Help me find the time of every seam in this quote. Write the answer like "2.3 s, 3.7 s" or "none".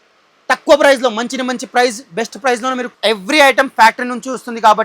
2.9 s

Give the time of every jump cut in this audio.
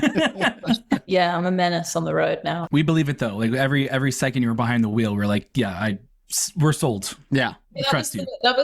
1.1 s, 2.6 s

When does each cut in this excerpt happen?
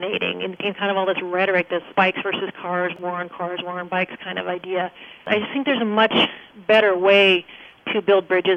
1.9 s, 2.9 s, 5.3 s

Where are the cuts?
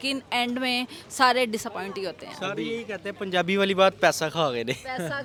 none

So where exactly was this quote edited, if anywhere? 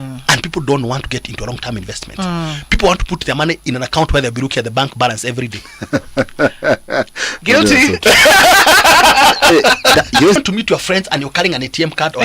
10.4 s

